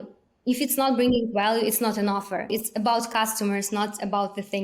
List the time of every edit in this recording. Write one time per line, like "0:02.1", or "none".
0:02.5

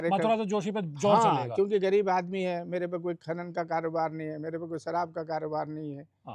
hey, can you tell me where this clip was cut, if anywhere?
none

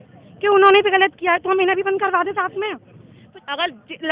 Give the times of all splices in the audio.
0:03.1

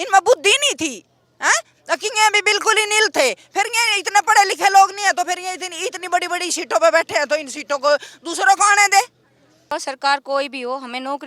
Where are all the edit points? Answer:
0:09.6

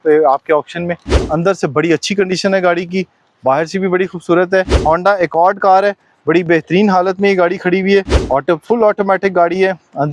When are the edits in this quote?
0:01.2
0:04.7
0:08.2

